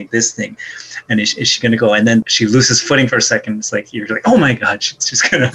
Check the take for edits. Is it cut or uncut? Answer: cut